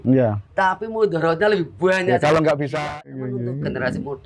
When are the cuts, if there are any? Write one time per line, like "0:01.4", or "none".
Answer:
0:02.7